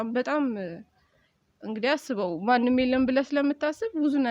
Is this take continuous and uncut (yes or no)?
yes